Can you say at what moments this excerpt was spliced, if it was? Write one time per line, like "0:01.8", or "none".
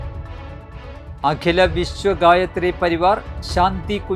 none